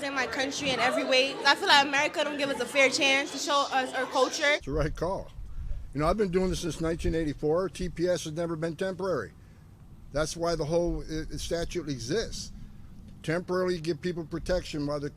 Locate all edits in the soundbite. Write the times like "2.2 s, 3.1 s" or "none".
4.6 s